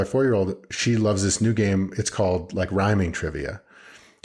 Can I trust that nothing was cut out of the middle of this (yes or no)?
yes